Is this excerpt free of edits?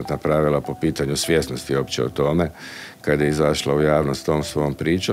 yes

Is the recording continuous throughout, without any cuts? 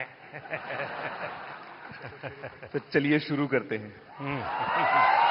yes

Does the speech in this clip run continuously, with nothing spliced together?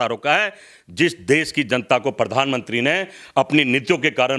yes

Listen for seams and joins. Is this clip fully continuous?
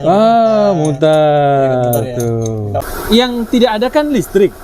no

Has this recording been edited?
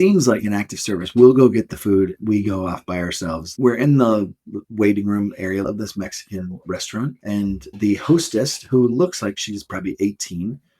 yes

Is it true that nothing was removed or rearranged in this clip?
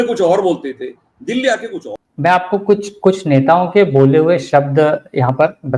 no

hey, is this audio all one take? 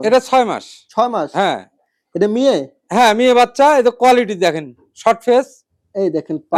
yes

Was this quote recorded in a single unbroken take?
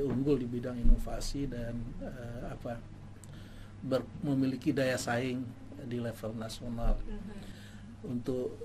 no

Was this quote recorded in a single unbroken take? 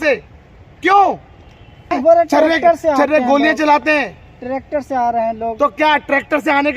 no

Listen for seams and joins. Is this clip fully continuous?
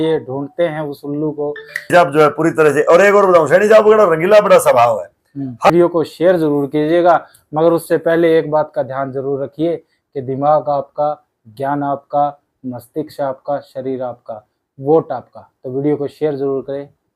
no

